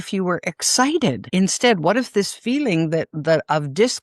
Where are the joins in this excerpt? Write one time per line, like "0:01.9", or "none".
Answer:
0:01.2